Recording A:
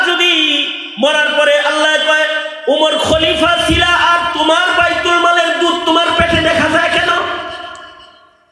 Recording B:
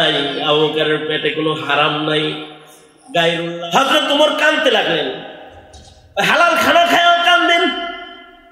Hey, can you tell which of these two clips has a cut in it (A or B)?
B